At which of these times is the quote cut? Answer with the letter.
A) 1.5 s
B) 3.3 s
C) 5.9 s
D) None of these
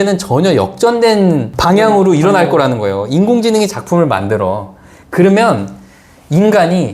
A